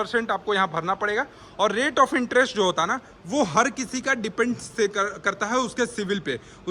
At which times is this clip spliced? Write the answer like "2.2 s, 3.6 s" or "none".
none